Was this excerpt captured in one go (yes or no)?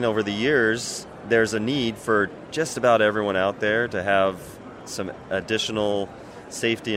yes